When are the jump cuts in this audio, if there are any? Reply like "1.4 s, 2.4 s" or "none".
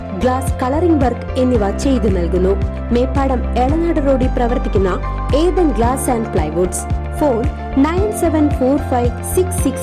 none

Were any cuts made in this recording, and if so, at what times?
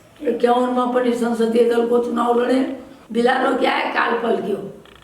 2.9 s

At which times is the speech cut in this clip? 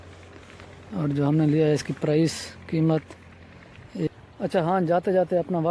4.1 s

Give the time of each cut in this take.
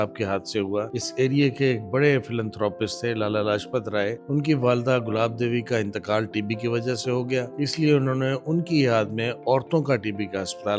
1.0 s, 4.2 s, 7.5 s

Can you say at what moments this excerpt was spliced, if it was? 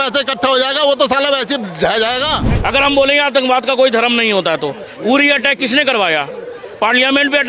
2.5 s

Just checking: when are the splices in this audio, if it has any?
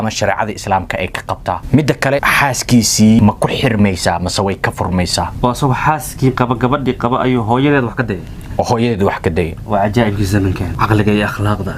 1.6 s, 2.2 s, 3.2 s, 5.3 s, 10.7 s

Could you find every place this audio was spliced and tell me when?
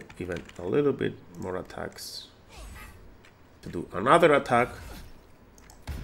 3.7 s

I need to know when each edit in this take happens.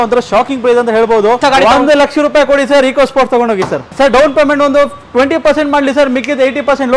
1.4 s, 3.9 s

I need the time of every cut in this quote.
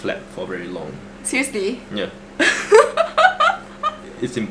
none

